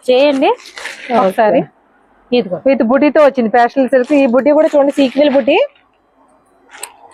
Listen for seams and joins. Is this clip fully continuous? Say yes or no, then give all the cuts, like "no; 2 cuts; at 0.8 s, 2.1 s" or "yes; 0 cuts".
yes; 0 cuts